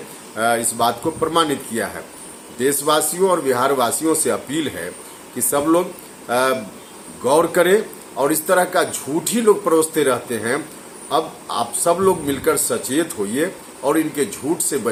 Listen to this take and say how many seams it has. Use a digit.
0